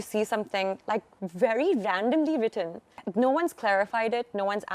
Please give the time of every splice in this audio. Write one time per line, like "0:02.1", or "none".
0:03.0